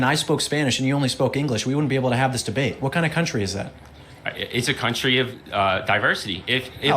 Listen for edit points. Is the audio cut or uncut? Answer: cut